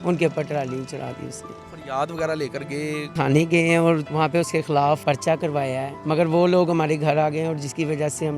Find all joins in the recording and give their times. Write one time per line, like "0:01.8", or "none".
0:01.6
0:03.1
0:04.1
0:05.0
0:05.9